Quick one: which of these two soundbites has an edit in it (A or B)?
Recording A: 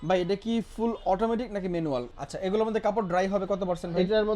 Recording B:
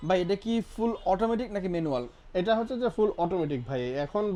A